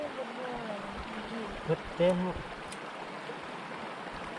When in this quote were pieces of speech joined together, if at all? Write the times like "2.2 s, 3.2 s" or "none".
none